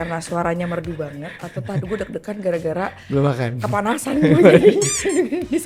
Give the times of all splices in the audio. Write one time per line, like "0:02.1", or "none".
none